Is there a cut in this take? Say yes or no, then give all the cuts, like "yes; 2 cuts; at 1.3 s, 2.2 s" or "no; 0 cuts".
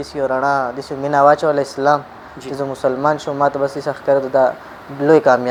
no; 0 cuts